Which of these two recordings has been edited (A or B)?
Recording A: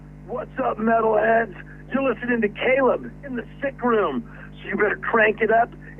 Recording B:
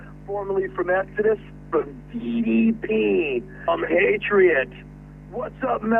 B